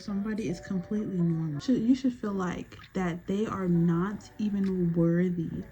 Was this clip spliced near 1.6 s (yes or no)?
yes